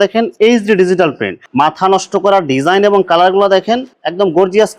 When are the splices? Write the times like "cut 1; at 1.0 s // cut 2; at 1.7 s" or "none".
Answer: cut 1; at 1.4 s